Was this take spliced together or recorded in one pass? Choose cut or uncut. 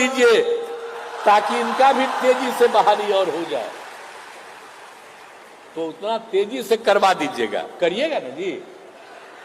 uncut